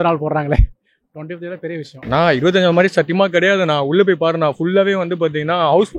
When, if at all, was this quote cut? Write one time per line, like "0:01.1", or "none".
0:01.9